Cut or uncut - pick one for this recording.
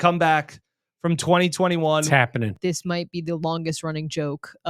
cut